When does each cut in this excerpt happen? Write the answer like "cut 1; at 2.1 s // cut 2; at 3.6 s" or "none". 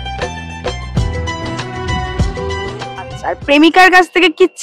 none